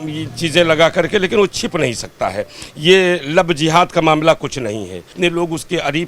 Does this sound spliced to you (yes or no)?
yes